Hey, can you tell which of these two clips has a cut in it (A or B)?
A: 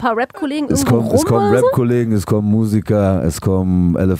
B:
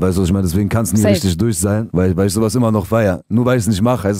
B